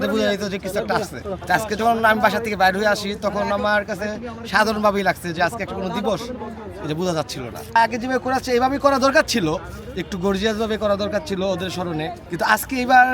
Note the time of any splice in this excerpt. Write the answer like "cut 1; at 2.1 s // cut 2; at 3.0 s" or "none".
cut 1; at 1.3 s // cut 2; at 7.8 s // cut 3; at 12.2 s